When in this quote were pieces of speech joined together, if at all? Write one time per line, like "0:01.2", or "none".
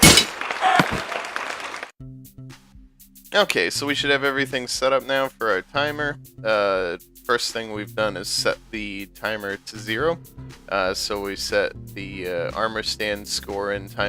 none